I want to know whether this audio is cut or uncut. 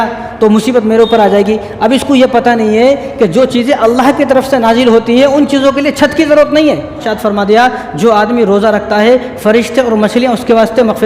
cut